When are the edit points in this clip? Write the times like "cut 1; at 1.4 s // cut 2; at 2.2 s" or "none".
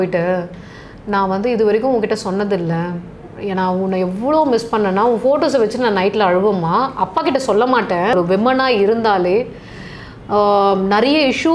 cut 1; at 8.1 s